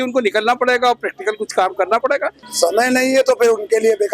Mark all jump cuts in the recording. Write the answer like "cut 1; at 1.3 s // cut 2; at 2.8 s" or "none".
cut 1; at 2.4 s